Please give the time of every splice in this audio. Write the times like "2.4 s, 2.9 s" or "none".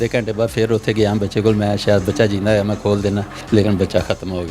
3.3 s

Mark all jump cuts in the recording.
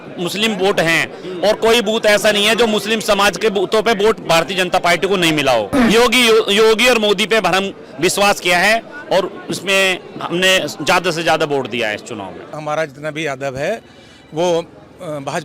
5.7 s, 12.5 s

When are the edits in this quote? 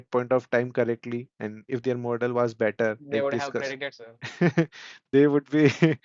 none

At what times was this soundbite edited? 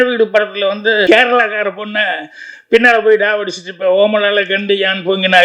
1.0 s

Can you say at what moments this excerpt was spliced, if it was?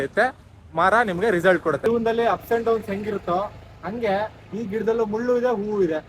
1.9 s

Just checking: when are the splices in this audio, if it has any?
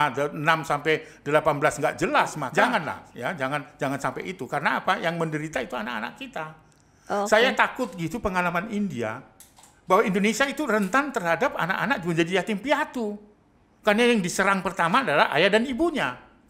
2.4 s

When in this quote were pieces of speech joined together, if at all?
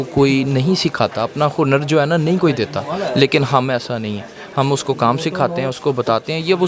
none

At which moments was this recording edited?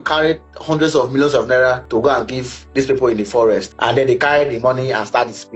1.8 s, 3.7 s

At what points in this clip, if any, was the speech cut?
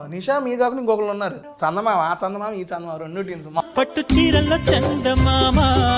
1.4 s, 3.6 s

